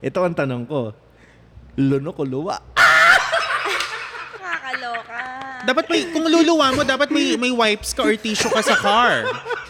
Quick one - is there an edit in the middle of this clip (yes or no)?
yes